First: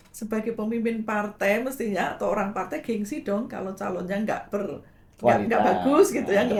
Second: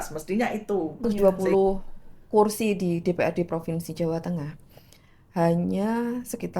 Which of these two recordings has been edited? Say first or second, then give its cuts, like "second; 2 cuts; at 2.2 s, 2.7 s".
second; 1 cut; at 1.1 s